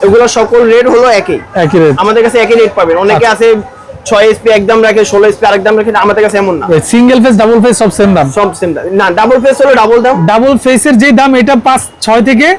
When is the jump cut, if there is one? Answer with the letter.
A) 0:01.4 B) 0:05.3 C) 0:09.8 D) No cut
D